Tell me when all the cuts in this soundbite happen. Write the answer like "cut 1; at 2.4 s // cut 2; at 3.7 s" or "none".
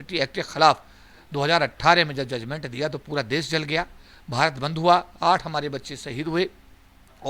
none